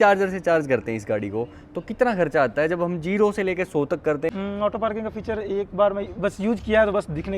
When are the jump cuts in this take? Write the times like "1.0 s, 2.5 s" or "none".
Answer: 4.3 s